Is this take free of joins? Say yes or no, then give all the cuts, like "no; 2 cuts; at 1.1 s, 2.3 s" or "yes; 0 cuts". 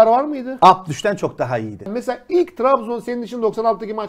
no; 1 cut; at 1.9 s